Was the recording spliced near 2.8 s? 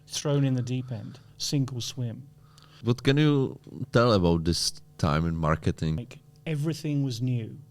yes; 2 cuts; at 2.8 s, 6.0 s

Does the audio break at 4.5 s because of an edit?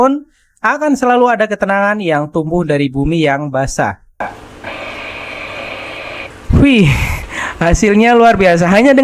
no; 1 cut; at 6.3 s

